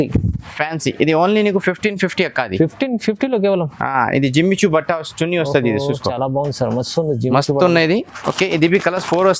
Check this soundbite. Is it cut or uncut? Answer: uncut